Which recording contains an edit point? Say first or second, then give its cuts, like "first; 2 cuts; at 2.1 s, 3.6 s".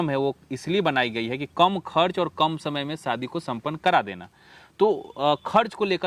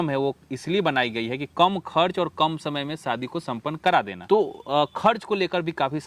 second; 1 cut; at 4.2 s